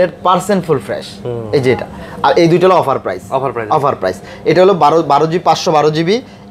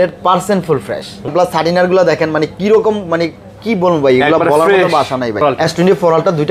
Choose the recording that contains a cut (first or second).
second